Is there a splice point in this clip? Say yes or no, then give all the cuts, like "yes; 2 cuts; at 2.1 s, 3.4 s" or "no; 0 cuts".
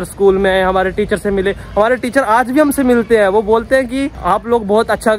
no; 0 cuts